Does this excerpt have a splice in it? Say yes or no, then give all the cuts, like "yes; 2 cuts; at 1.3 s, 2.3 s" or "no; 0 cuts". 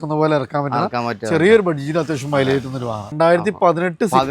yes; 1 cut; at 3.1 s